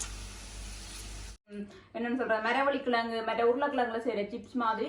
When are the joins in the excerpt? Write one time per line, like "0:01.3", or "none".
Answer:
0:01.5